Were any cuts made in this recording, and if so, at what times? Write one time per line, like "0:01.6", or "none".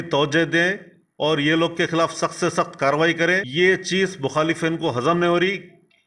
0:03.5